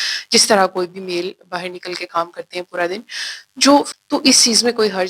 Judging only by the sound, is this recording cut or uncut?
cut